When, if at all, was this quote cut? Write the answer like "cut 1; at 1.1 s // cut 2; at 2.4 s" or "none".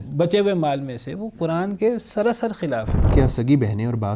cut 1; at 3.1 s